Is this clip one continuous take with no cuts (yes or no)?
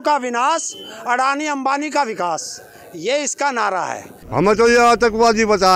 no